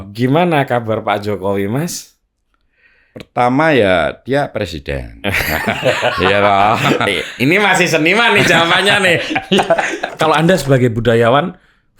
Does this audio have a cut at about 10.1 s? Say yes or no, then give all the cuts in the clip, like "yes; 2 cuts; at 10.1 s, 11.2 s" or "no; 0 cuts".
yes; 1 cut; at 10.1 s